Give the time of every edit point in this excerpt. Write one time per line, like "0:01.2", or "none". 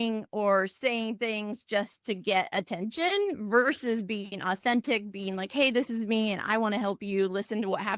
none